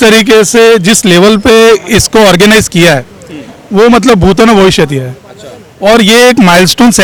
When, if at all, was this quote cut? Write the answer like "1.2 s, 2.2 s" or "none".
none